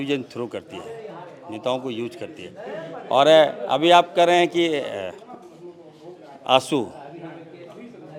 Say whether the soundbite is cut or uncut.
uncut